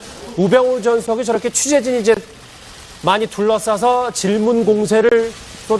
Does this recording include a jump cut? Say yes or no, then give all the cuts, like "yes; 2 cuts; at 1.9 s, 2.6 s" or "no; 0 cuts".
yes; 1 cut; at 4.6 s